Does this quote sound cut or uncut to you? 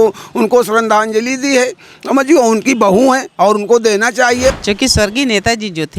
cut